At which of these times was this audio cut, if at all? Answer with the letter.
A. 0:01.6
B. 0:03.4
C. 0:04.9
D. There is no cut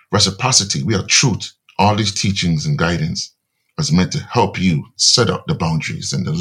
A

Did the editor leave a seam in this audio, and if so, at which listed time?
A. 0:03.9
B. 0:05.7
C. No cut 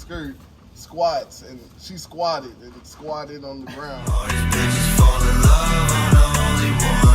A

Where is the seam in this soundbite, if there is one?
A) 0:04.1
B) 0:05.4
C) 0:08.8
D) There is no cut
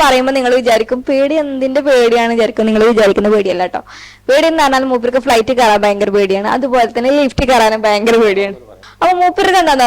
C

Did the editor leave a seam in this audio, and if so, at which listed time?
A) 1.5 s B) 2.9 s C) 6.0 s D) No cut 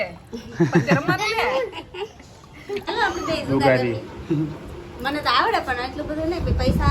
B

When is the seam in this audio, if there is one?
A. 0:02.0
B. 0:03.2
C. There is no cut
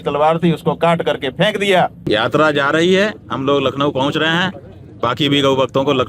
A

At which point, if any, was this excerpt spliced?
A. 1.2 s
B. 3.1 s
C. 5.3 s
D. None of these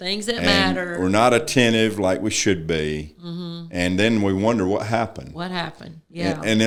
D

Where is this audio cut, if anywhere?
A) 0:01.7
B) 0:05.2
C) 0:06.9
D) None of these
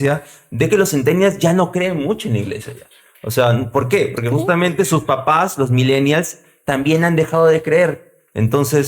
D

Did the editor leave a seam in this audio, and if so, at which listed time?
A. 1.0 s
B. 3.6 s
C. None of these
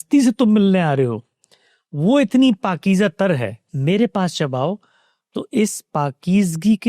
B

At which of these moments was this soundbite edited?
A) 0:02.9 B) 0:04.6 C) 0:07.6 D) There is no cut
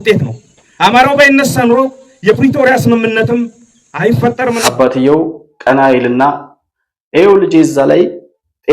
B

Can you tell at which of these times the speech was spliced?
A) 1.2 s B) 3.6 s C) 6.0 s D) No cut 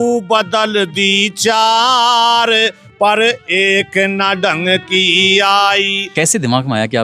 C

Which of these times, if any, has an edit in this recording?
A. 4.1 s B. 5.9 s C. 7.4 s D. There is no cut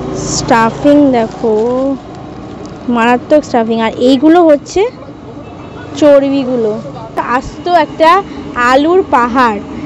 C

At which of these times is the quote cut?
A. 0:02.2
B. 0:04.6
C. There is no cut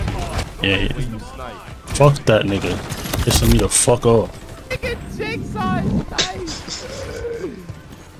B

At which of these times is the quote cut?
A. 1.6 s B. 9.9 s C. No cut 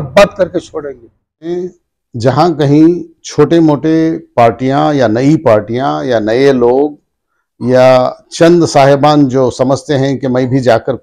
A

